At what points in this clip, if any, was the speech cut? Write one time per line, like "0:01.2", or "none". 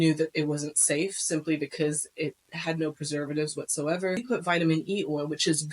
0:04.2